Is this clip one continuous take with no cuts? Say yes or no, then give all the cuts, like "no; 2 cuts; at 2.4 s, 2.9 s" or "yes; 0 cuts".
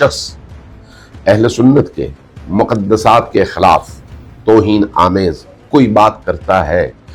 yes; 0 cuts